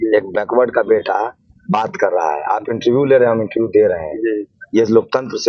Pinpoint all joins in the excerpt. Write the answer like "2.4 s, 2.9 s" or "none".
none